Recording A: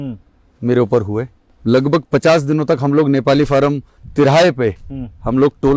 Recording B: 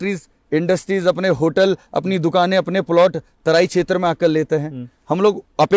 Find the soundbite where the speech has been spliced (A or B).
A